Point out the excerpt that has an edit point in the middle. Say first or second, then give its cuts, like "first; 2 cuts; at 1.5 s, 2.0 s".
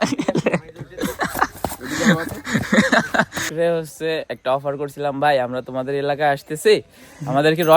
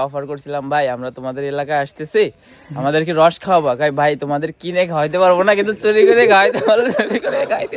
first; 2 cuts; at 0.9 s, 3.5 s